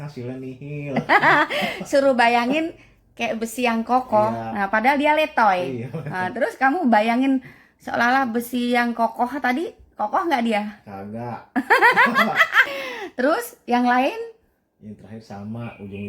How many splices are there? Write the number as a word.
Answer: one